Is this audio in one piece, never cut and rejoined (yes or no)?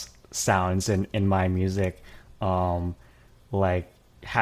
yes